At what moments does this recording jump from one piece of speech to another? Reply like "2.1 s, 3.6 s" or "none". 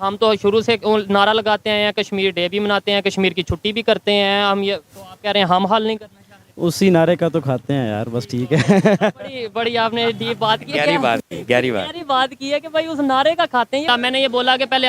13.9 s